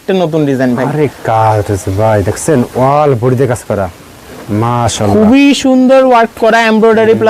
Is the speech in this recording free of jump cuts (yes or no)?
yes